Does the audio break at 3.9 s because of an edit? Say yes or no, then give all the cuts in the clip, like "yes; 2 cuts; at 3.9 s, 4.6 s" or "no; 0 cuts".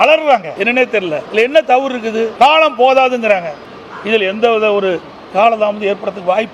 no; 2 cuts; at 0.9 s, 2.3 s